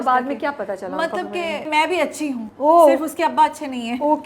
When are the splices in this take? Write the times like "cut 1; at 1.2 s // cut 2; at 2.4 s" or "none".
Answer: cut 1; at 1.7 s // cut 2; at 2.5 s

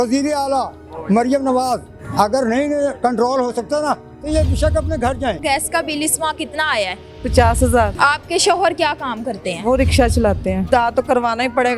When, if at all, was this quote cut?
cut 1; at 5.4 s // cut 2; at 7.9 s // cut 3; at 10.7 s

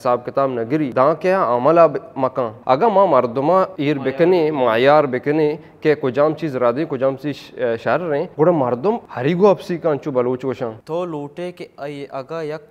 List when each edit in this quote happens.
cut 1; at 0.9 s // cut 2; at 2.5 s // cut 3; at 3.7 s // cut 4; at 8.3 s // cut 5; at 9.1 s // cut 6; at 10.8 s

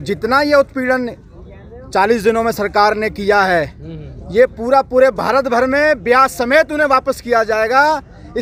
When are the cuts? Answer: none

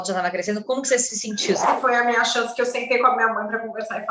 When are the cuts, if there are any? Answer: cut 1; at 1.7 s

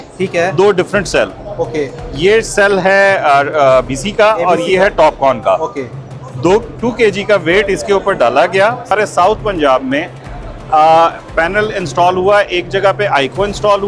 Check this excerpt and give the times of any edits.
cut 1; at 8.9 s

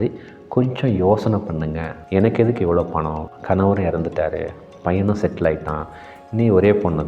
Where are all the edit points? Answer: cut 1; at 1.9 s

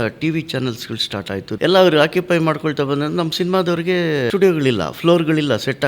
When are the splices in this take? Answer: cut 1; at 1.5 s // cut 2; at 4.3 s

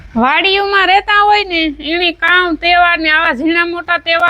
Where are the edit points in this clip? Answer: none

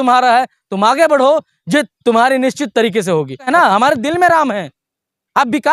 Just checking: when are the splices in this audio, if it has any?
cut 1; at 3.5 s

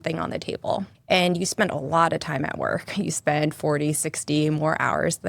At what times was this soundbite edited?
cut 1; at 0.9 s

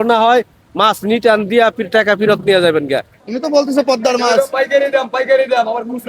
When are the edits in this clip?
cut 1; at 3.1 s

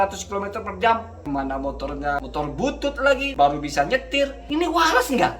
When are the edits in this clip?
cut 1; at 1.1 s // cut 2; at 2.2 s // cut 3; at 3.3 s // cut 4; at 4.4 s

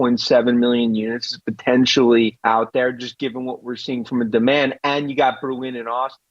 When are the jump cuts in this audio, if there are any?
cut 1; at 2.4 s

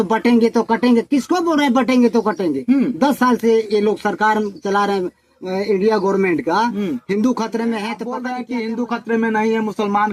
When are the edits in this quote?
cut 1; at 8.1 s

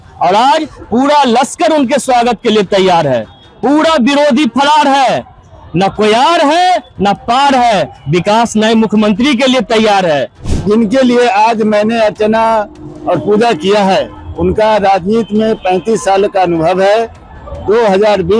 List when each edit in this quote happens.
cut 1; at 10.4 s

